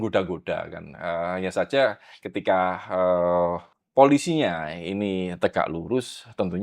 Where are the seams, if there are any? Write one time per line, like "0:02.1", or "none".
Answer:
0:03.7